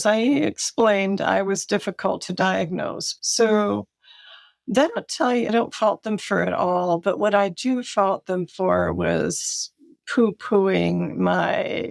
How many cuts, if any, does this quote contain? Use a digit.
1